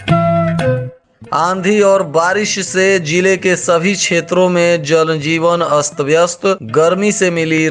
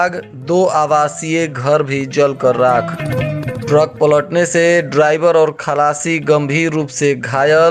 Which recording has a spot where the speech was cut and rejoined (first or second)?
first